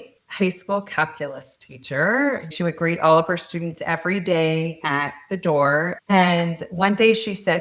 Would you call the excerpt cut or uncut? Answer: cut